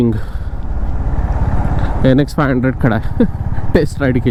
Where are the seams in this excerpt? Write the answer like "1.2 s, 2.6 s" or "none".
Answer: none

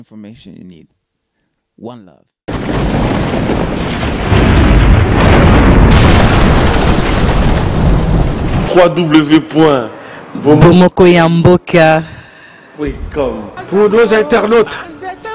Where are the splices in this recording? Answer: 8.7 s

